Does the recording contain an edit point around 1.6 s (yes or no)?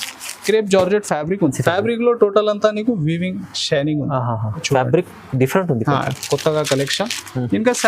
yes